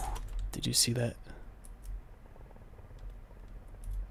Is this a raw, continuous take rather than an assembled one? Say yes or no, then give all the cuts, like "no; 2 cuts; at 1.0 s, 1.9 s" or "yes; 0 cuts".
yes; 0 cuts